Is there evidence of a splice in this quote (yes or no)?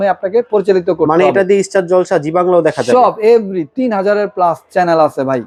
no